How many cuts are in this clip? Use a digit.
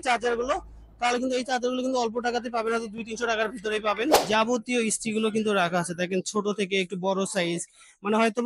1